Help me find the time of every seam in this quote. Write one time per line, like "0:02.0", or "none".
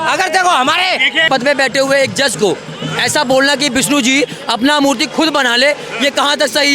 0:01.2

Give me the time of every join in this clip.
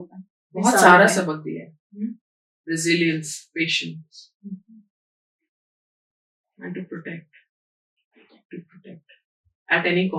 none

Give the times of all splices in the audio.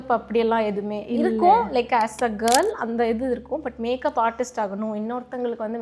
none

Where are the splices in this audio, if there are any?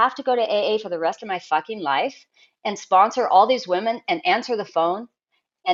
none

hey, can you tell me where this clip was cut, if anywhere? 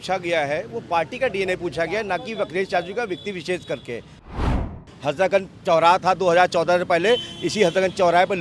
0:04.5

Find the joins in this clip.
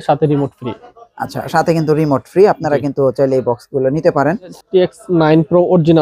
0:04.6

